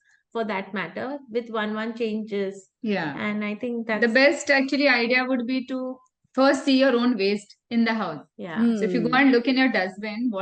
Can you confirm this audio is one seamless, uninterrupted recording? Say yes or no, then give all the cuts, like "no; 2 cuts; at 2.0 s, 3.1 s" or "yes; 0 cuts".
yes; 0 cuts